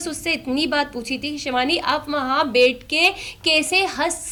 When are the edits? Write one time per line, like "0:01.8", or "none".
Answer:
none